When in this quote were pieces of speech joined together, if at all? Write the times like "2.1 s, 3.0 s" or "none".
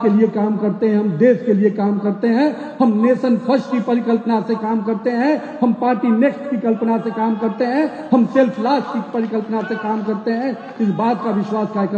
none